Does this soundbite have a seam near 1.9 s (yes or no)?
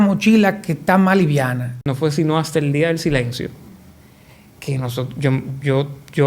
yes